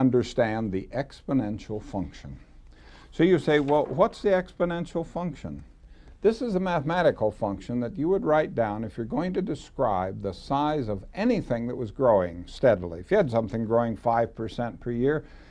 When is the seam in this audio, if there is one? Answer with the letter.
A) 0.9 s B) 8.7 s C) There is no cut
A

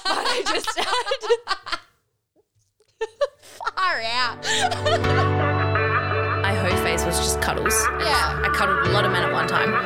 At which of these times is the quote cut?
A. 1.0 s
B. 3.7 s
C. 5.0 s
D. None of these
C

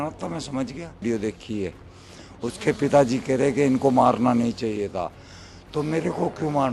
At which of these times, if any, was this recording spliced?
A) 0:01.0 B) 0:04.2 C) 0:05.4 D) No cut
A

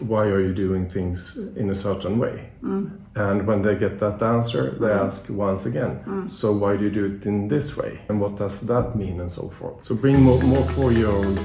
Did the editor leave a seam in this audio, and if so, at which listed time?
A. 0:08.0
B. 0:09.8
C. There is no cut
A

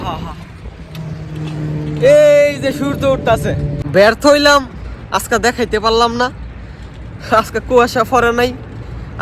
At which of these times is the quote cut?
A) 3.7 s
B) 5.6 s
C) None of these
A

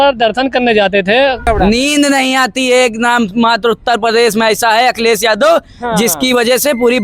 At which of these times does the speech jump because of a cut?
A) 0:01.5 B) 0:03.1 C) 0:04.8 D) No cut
A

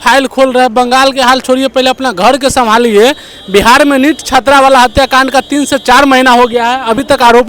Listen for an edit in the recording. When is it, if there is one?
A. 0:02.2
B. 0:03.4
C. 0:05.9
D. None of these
D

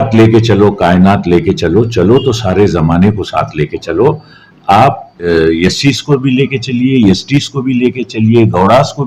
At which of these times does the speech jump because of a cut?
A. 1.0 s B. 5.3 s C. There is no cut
B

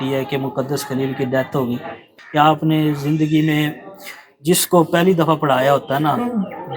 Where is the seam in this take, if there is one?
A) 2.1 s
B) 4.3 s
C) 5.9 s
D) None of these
A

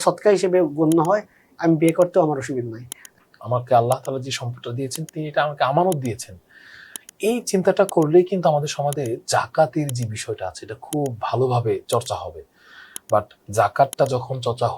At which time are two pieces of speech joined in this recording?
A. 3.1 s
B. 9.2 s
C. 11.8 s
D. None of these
A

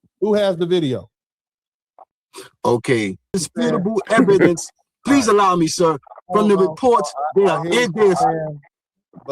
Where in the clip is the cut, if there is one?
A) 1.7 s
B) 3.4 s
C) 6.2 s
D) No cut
B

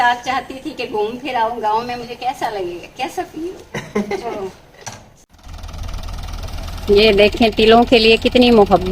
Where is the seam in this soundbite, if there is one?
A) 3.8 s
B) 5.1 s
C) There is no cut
B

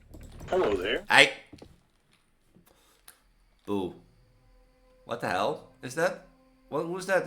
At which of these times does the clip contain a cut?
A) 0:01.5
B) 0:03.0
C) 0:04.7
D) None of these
B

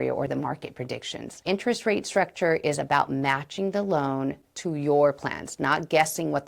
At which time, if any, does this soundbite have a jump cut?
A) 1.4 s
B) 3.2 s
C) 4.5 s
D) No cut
A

